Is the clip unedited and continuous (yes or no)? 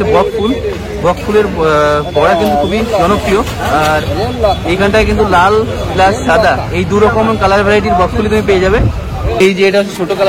no